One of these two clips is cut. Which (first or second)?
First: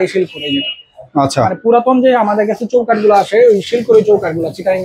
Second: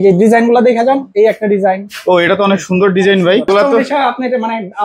second